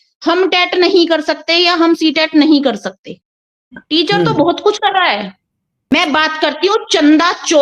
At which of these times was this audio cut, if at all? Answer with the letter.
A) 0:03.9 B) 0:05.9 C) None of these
B